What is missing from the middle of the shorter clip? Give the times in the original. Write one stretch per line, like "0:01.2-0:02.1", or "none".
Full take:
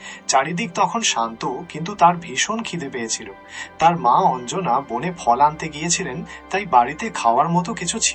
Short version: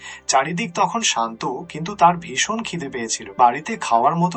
0:03.2-0:06.6